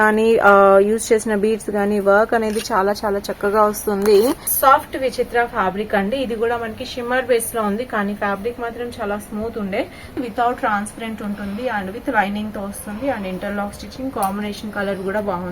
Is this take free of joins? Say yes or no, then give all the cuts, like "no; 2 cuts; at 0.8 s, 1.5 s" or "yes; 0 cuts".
no; 2 cuts; at 4.5 s, 10.2 s